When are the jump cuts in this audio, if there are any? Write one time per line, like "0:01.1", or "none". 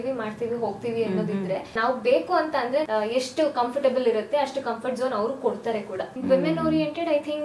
0:01.8
0:02.9
0:06.1